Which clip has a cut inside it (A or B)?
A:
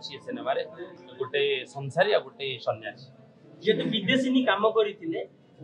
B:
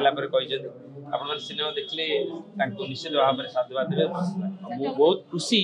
B